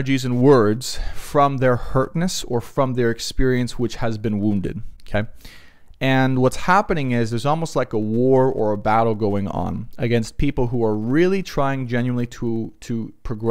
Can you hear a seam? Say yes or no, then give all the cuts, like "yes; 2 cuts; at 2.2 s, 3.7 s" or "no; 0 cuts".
no; 0 cuts